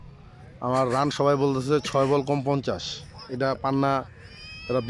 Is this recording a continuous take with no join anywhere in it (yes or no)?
yes